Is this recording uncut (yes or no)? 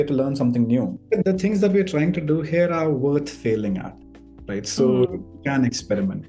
no